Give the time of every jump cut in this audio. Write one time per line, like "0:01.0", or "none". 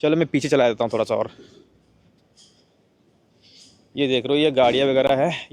none